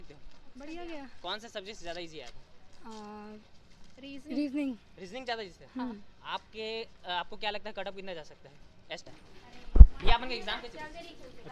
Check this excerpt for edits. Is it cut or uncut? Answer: cut